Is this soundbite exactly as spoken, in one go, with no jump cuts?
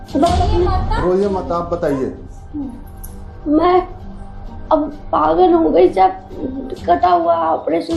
yes; 0 cuts

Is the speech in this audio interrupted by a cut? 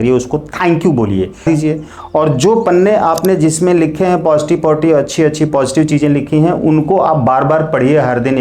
yes; 1 cut; at 1.4 s

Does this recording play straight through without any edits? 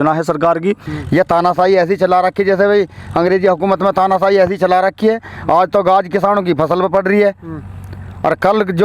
no; 1 cut; at 0.9 s

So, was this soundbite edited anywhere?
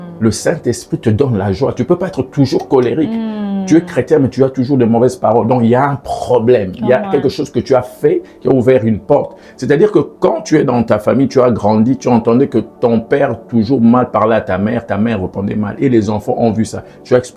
no; 0 cuts

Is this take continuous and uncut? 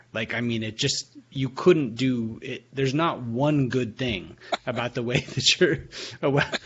yes; 0 cuts

